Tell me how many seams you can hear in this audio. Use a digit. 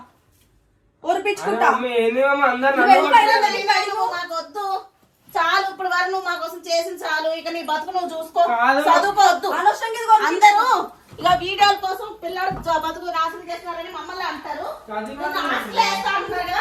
0